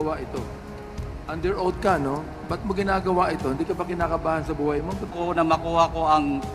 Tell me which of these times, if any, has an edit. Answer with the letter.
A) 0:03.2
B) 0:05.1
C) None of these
B